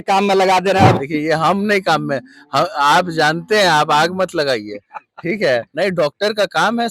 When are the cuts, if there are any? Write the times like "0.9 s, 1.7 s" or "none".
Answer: 0.9 s, 5.7 s